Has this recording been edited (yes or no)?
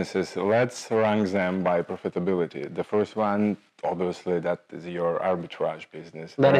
no